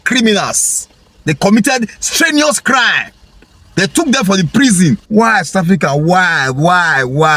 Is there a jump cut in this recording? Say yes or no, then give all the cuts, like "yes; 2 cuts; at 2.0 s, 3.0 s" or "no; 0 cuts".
no; 0 cuts